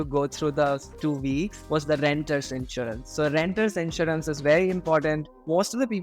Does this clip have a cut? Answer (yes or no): yes